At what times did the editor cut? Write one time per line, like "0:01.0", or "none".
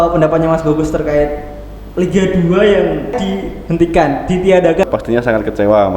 0:03.2
0:04.8